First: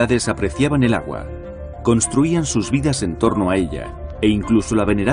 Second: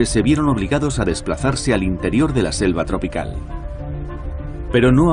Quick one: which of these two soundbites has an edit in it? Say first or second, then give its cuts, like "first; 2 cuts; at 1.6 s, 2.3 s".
first; 1 cut; at 3.6 s